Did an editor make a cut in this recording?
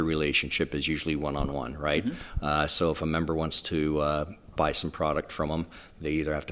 no; 0 cuts

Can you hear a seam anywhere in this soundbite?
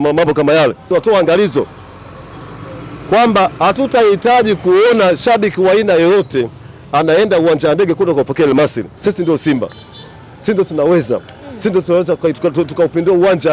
yes; 2 cuts; at 0.9 s, 8.9 s

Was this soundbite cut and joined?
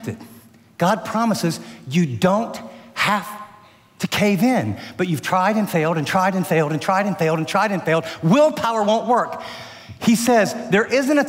no; 0 cuts

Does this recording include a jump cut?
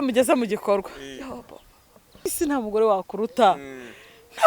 yes; 1 cut; at 2.2 s

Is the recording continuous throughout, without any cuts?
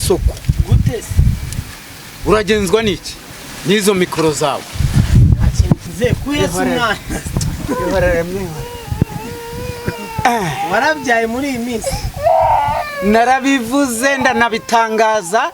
no; 1 cut; at 5.9 s

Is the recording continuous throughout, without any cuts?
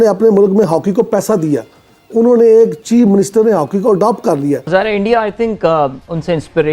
no; 1 cut; at 4.7 s

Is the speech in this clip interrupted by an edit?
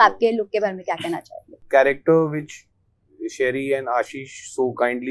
yes; 1 cut; at 1.7 s

